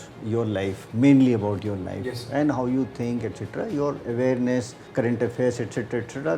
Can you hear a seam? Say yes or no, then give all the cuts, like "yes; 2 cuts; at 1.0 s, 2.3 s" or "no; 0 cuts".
yes; 1 cut; at 4.8 s